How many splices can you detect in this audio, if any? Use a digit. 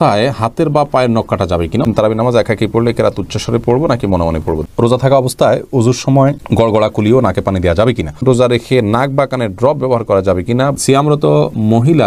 4